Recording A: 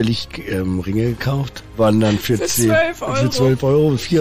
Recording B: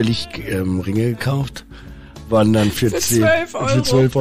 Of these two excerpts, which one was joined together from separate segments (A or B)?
A